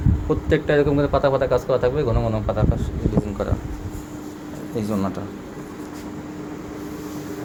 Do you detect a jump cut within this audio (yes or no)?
no